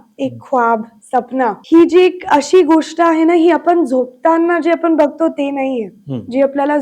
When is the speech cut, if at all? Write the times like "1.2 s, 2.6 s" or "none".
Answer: 1.6 s